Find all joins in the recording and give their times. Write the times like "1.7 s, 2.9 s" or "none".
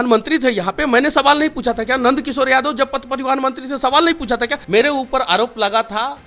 4.6 s